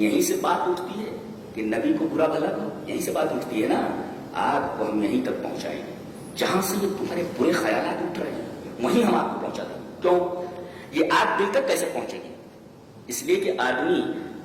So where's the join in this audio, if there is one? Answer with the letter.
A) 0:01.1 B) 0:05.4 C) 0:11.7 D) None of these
D